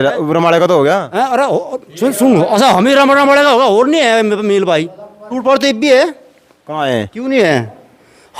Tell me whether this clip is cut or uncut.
cut